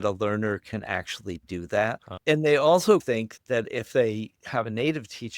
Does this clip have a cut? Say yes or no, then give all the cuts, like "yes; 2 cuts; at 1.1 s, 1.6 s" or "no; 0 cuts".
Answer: yes; 1 cut; at 2.1 s